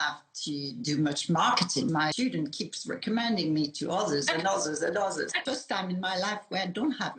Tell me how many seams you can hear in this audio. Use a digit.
2